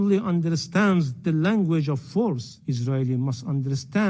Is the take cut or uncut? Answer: cut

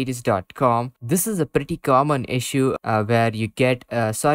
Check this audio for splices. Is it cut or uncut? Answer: cut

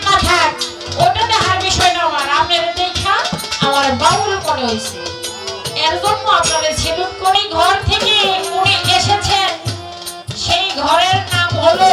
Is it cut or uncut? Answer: cut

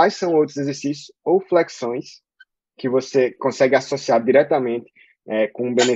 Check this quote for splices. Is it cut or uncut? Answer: uncut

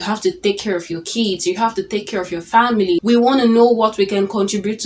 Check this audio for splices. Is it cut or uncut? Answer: cut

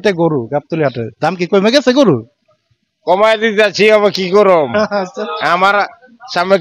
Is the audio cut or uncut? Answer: uncut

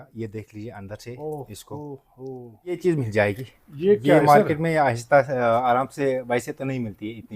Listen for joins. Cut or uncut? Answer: cut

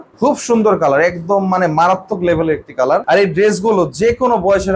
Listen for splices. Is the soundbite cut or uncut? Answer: uncut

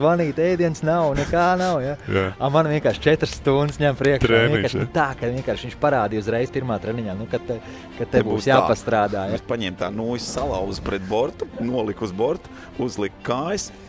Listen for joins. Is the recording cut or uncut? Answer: cut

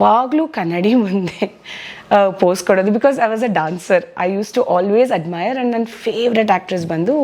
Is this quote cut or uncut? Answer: uncut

